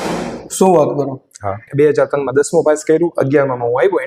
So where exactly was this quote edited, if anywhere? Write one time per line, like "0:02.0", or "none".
0:01.6